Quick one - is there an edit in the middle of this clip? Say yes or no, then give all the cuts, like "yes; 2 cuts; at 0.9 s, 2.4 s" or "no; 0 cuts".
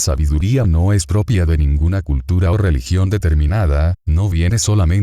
yes; 1 cut; at 1.4 s